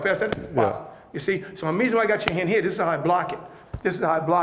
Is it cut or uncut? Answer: uncut